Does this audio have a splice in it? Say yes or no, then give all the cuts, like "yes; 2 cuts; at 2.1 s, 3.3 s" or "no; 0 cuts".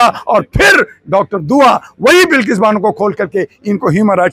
no; 0 cuts